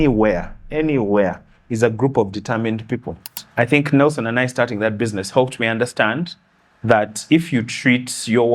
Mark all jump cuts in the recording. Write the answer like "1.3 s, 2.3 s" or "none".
3.4 s